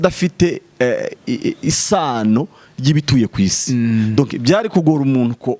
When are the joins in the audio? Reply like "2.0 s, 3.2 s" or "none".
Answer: none

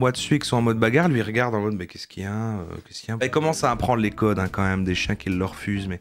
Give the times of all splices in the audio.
3.2 s

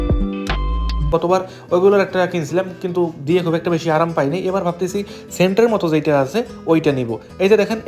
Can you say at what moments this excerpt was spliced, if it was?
1.1 s

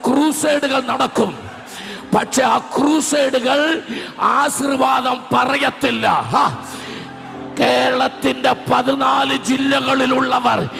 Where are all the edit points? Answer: none

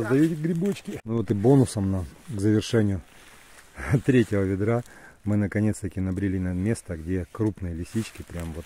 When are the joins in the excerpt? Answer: 1.0 s

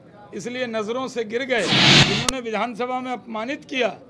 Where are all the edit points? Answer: 1.9 s

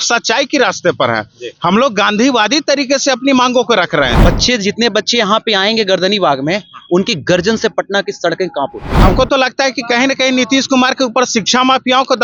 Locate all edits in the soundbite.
4.1 s, 8.8 s

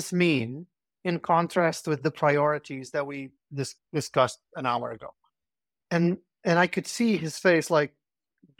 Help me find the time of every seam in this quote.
none

